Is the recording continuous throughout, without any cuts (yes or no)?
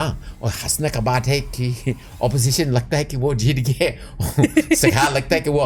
yes